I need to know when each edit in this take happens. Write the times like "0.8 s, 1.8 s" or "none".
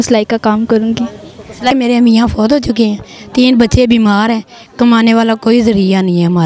1.7 s